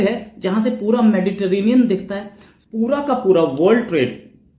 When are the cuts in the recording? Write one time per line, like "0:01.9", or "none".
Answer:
0:02.5